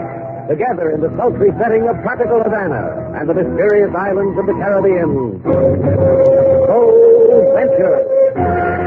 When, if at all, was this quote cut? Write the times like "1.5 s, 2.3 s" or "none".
none